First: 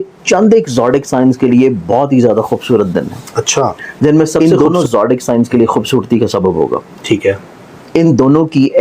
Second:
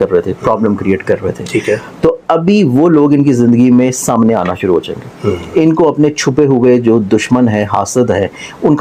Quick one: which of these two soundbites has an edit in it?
first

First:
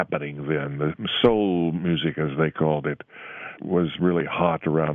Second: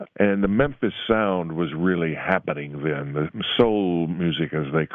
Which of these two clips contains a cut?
first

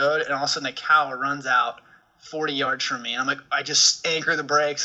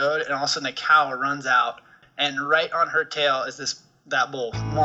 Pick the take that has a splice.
second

